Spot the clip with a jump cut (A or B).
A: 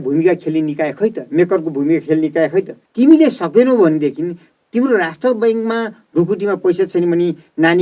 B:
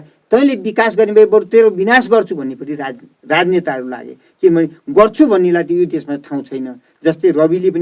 A